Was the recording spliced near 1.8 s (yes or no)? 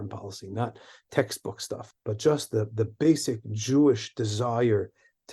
yes